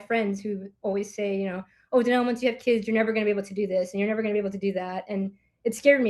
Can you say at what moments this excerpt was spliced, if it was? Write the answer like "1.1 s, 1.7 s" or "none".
none